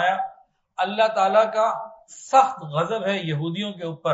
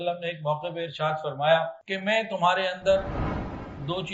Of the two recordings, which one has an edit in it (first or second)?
second